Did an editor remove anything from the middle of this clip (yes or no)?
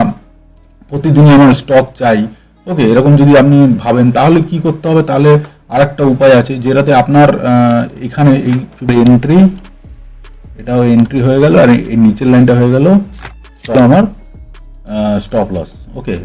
yes